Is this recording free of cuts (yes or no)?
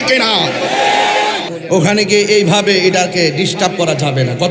no